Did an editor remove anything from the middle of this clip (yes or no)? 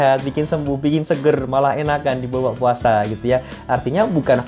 no